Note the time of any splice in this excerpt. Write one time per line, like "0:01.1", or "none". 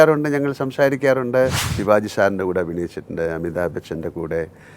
0:01.7